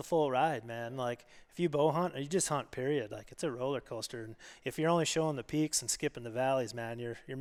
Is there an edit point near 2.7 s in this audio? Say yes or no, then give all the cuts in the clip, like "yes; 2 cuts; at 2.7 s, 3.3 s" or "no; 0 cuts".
no; 0 cuts